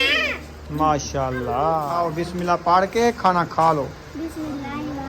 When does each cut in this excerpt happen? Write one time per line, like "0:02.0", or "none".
0:01.9